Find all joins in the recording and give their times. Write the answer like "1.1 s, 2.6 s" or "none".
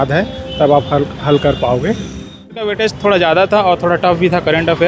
2.5 s